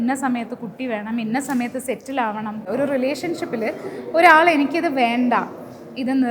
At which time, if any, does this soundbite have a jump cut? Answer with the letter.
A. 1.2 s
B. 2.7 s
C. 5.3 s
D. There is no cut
B